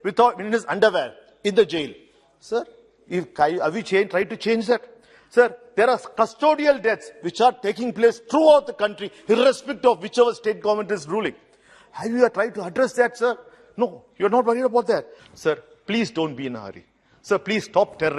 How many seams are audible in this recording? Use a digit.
1